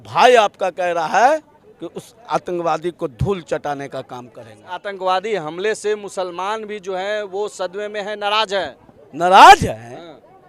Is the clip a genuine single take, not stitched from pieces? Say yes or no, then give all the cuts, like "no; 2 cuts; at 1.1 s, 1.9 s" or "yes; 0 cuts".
no; 1 cut; at 4.8 s